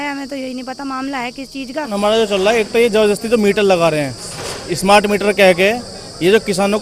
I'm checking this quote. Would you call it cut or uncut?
cut